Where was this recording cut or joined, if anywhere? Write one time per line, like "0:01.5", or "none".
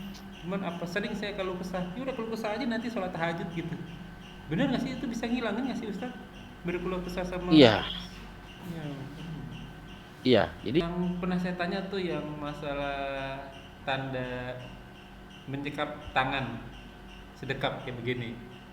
0:10.8